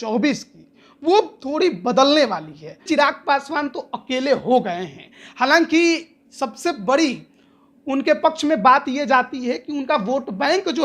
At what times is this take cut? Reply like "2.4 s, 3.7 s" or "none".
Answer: 2.8 s